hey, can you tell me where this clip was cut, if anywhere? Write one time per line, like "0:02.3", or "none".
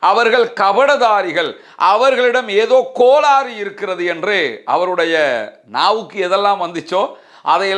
none